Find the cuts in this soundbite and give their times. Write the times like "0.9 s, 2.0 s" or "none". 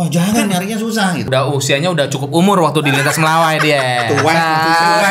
1.3 s

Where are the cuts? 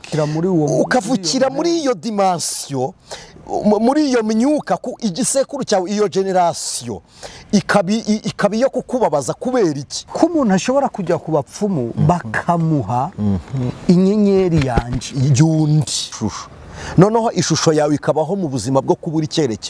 10.0 s, 16.2 s

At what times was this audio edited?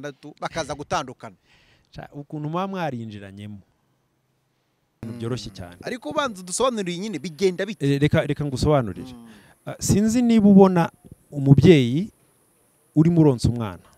5.0 s

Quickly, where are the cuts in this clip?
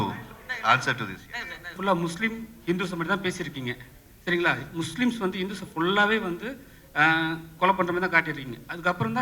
1.8 s

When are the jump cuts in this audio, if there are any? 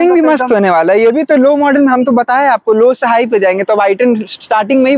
none

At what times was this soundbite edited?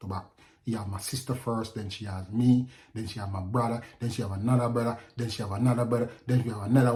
none

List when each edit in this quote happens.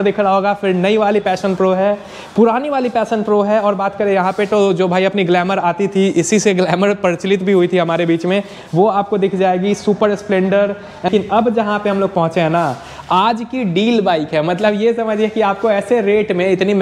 11.1 s

